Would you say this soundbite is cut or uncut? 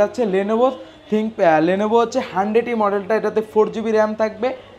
uncut